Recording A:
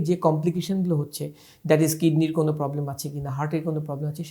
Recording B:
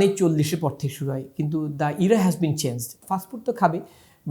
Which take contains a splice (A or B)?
B